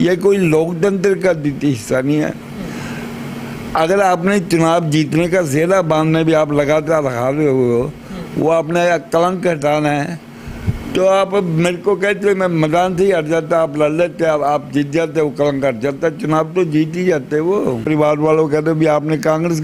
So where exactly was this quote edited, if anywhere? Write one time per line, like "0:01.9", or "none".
0:17.8

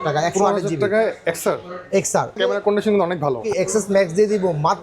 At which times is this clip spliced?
0:02.3
0:03.4

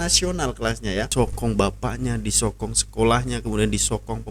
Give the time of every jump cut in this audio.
0:01.1

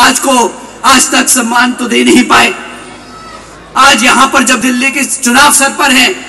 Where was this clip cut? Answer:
0:04.6

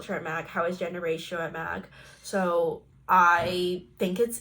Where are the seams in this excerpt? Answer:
none

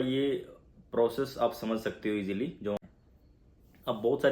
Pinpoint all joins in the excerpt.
0:02.8

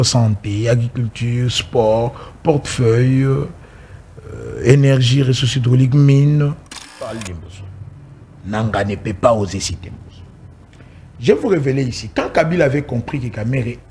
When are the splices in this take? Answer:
0:07.2

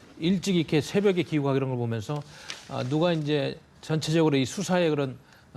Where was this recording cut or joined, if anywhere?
none

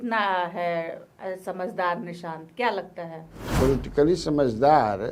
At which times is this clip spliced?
0:03.6

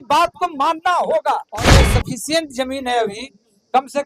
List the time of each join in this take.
0:01.7

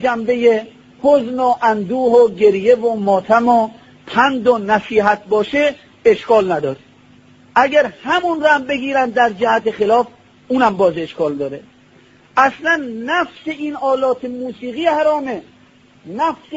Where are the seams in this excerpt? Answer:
0:11.0

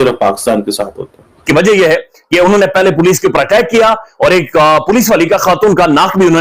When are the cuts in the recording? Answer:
0:01.4

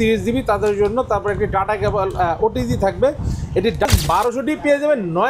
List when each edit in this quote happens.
0:03.9

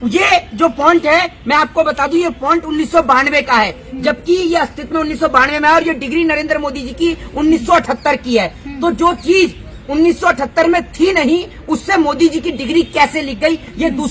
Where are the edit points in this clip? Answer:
none

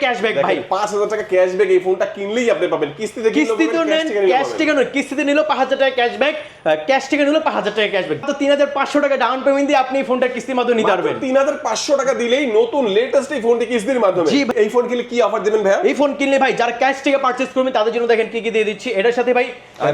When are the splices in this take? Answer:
0:08.2
0:14.5

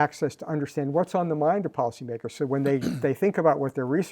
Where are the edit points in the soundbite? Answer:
none

